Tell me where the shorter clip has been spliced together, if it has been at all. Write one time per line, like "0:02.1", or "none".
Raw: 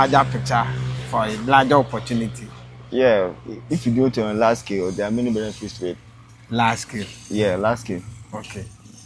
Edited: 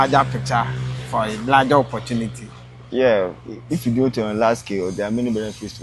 none